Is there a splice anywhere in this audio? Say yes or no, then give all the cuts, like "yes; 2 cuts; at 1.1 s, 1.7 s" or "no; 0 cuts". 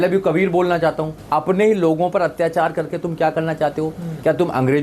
yes; 1 cut; at 1.1 s